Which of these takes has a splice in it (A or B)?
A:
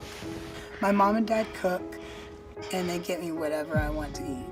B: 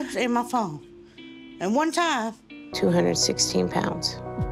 B